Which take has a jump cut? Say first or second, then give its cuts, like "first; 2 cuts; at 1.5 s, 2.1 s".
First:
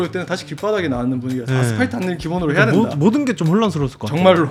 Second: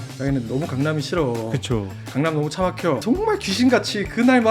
second; 1 cut; at 3.0 s